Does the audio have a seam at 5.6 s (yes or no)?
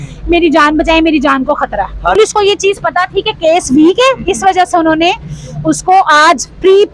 no